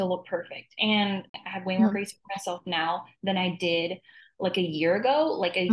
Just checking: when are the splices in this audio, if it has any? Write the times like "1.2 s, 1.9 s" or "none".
1.3 s

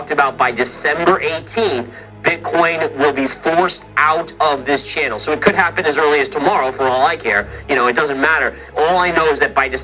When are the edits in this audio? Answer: none

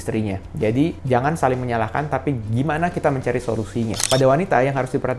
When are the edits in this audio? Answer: 4.0 s

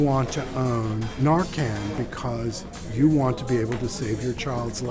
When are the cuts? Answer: 1.1 s

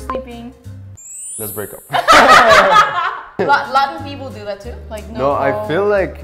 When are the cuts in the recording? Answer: none

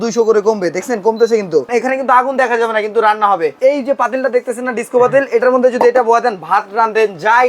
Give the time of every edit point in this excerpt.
1.7 s, 3.6 s

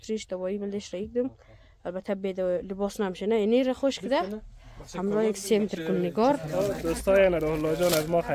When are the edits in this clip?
6.7 s

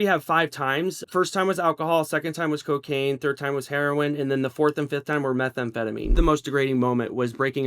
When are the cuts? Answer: 1.0 s, 6.2 s

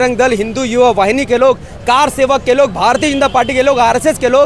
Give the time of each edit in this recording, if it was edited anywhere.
none

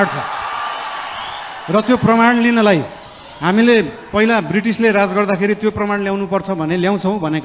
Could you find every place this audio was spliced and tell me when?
none

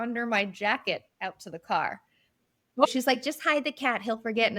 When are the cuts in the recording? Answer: 2.9 s

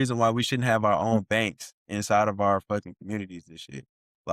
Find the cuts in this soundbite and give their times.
none

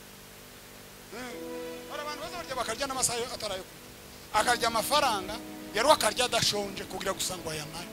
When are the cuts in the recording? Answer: none

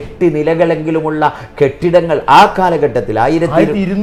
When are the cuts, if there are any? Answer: none

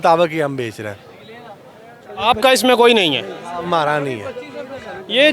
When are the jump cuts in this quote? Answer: none

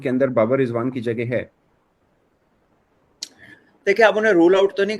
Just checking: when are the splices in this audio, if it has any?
none

